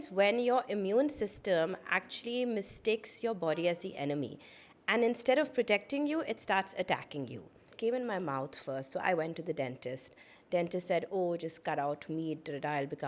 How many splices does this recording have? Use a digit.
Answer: 1